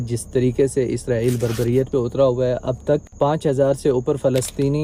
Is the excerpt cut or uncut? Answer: uncut